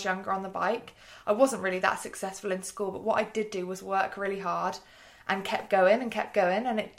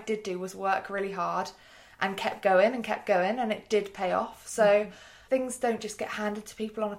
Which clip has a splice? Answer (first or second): second